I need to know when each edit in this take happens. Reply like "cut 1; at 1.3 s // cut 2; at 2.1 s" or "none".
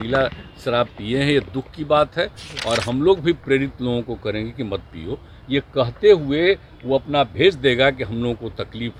none